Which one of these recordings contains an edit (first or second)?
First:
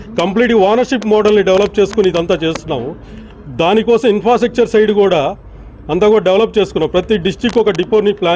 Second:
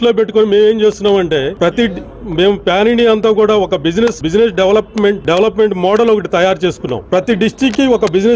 second